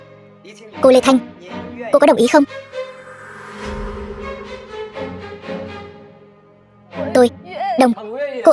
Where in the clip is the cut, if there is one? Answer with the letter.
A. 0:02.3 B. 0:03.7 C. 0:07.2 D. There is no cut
D